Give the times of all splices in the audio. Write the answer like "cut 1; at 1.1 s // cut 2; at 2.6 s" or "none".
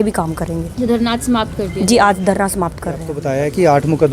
cut 1; at 3.1 s